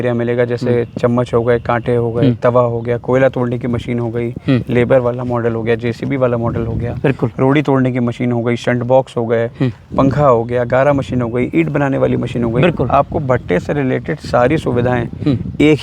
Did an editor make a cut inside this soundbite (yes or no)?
yes